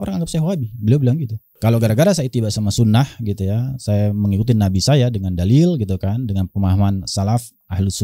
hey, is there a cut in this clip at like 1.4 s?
yes; 1 cut; at 1.4 s

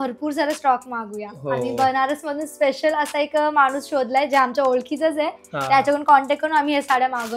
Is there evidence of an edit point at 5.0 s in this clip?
no; 0 cuts

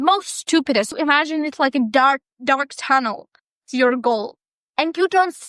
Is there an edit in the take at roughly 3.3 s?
no; 1 cut; at 0.9 s

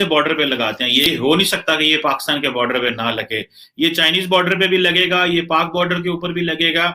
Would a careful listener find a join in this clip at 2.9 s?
no; 1 cut; at 1.1 s

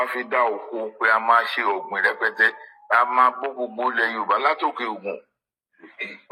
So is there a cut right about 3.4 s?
no; 0 cuts

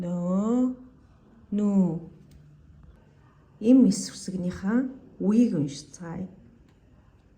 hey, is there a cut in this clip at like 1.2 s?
no; 1 cut; at 2.9 s

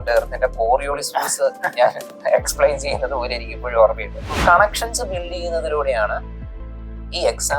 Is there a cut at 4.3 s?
yes; 1 cut; at 4.3 s

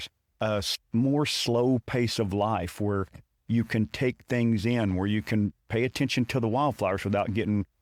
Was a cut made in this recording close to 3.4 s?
no; 0 cuts

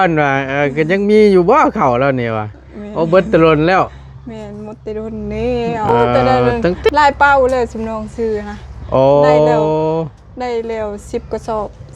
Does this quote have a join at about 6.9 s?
yes; 1 cut; at 6.9 s

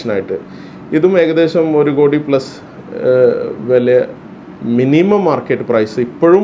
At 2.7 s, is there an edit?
no; 0 cuts

